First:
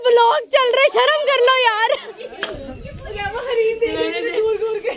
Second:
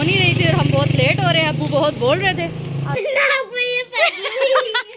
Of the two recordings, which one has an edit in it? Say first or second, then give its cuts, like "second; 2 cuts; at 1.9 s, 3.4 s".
second; 1 cut; at 2.9 s